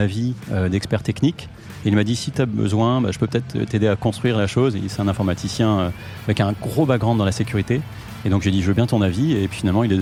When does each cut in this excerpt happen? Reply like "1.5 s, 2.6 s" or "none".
none